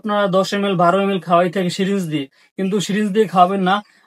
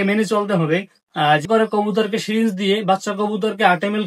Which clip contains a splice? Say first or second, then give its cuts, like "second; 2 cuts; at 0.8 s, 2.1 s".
second; 1 cut; at 1.5 s